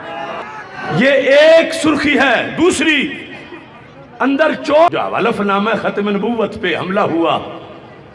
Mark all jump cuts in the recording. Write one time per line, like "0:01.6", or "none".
0:04.9